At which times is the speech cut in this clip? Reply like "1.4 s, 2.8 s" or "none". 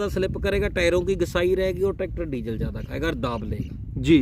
none

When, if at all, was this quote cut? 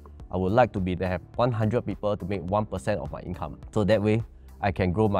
1.2 s, 3.5 s

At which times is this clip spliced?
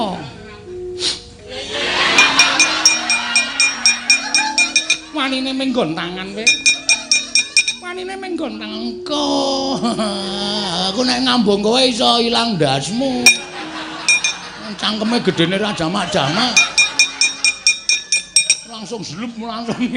none

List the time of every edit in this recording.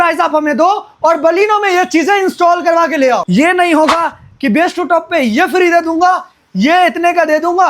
3.2 s

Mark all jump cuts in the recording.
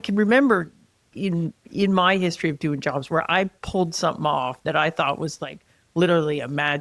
none

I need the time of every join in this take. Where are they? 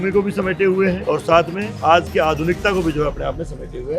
1.0 s, 1.8 s

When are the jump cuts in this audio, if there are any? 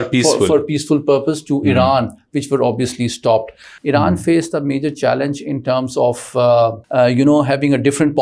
3.7 s, 6.8 s

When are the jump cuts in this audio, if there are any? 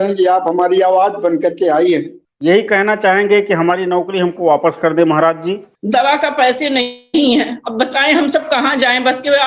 2.2 s, 5.7 s

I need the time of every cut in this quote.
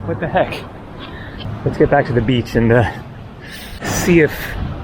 1.4 s, 3.8 s

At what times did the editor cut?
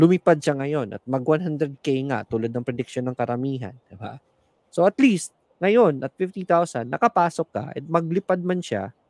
none

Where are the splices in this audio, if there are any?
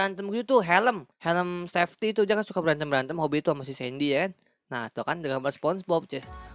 1.1 s

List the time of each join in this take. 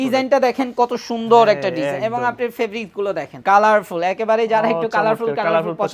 3.3 s

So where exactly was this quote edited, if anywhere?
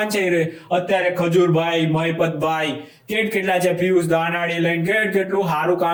none

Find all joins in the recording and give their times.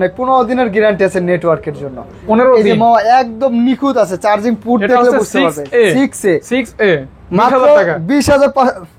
none

